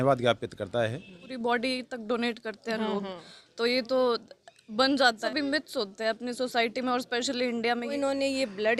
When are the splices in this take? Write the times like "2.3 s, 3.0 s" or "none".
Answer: 1.2 s, 5.2 s, 7.9 s